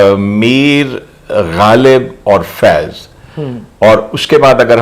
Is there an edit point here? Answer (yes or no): no